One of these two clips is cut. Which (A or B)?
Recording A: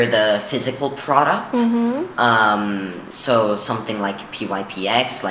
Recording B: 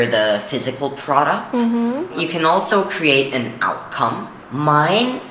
B